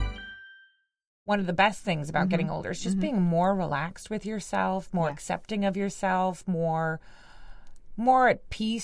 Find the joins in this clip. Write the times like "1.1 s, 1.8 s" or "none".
1.3 s